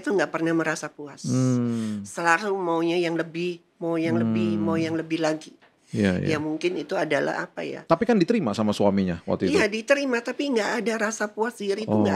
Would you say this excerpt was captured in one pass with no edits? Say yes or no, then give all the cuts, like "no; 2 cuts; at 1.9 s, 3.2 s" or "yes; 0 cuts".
yes; 0 cuts